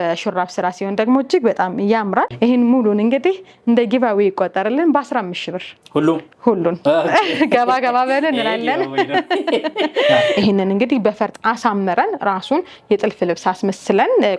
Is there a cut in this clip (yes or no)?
yes